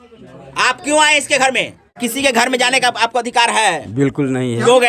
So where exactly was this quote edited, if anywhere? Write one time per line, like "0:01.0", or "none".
0:01.9